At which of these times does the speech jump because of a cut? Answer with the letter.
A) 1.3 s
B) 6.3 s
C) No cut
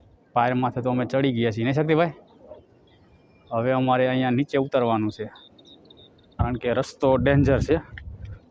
B